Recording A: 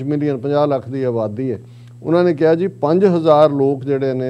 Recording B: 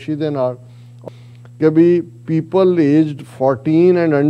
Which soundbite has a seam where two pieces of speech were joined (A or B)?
B